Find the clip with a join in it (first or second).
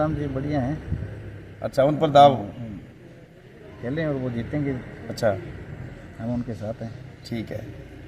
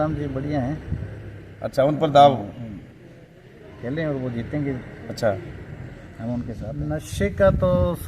second